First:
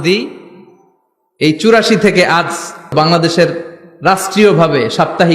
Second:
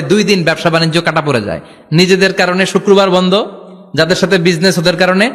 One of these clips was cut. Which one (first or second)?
first